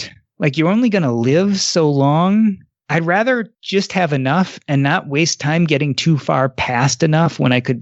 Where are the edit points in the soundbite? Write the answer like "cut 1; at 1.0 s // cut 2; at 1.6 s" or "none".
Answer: cut 1; at 2.7 s // cut 2; at 3.6 s